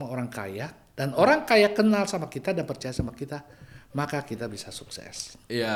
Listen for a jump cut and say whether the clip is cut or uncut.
uncut